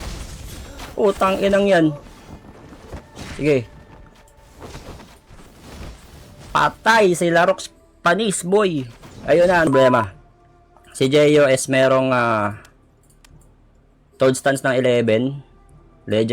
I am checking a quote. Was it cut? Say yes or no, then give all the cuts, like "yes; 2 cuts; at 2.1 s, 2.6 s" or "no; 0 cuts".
yes; 1 cut; at 9.7 s